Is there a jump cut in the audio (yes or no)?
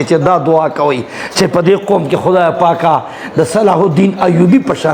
no